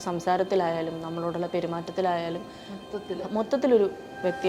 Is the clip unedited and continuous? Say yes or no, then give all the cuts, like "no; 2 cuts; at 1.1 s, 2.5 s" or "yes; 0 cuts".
yes; 0 cuts